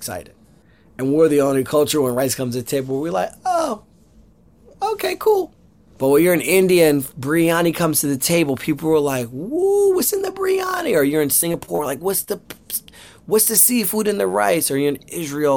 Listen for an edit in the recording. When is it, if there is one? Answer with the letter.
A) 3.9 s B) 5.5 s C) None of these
B